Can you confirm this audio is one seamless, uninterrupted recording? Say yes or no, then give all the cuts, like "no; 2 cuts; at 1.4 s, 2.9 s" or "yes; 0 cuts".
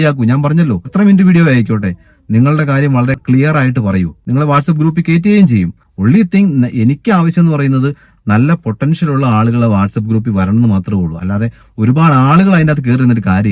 no; 3 cuts; at 0.9 s, 4.2 s, 5.8 s